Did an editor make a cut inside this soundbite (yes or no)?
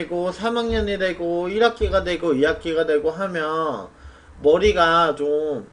no